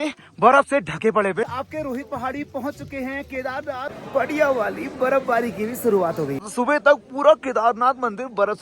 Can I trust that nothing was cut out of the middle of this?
no; 3 cuts; at 1.5 s, 3.9 s, 6.4 s

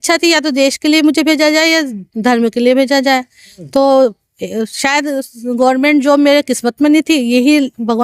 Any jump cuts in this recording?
no; 0 cuts

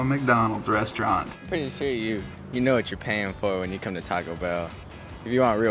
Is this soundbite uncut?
no; 1 cut; at 1.4 s

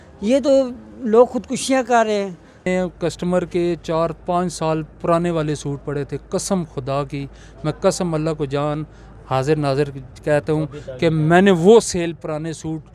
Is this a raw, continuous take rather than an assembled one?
no; 1 cut; at 2.6 s

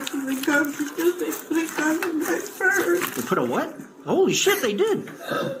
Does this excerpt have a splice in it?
no; 0 cuts

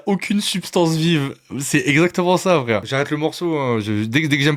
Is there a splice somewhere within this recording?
no; 0 cuts

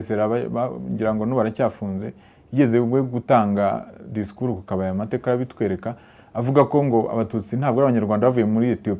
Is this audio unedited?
yes; 0 cuts

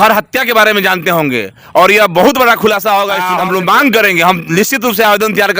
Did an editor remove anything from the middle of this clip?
yes; 1 cut; at 3.2 s

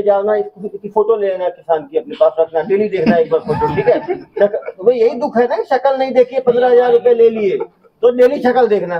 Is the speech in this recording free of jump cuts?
yes; 0 cuts

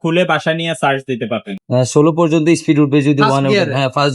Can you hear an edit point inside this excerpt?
yes; 1 cut; at 1.5 s

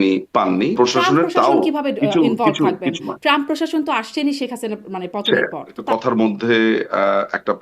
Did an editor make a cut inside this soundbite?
yes; 2 cuts; at 0.7 s, 5.8 s

